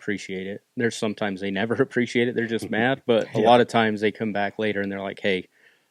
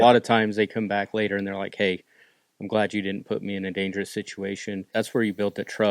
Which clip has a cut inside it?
second; 1 cut; at 4.9 s

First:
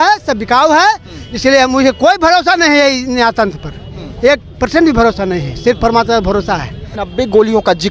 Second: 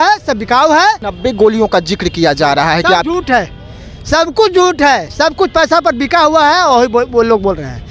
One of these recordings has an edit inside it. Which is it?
second; 1 cut; at 1.1 s

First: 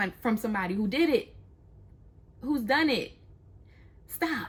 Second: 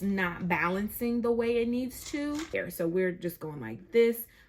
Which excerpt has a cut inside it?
second; 1 cut; at 2.5 s

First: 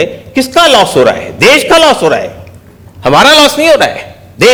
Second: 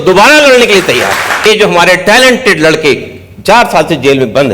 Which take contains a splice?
second; 1 cut; at 1.5 s

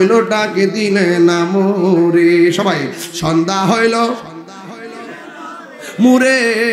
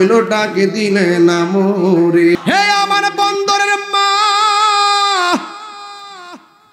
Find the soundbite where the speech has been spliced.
second; 1 cut; at 2.4 s

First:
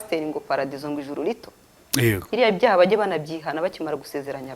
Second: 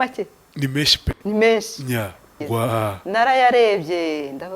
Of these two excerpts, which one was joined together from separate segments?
second; 1 cut; at 2.4 s

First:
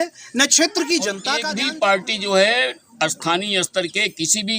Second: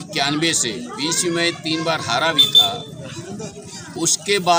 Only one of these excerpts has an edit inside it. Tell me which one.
first; 1 cut; at 1.3 s

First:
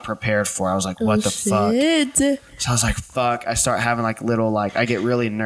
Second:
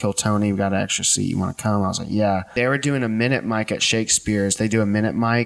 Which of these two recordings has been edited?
second; 1 cut; at 2.5 s

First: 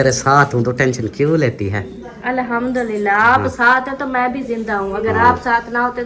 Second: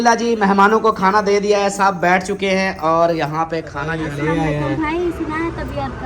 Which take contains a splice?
second; 1 cut; at 3.9 s

